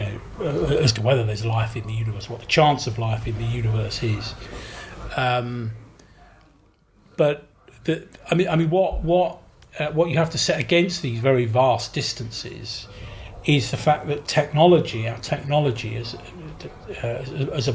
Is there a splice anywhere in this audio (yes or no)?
no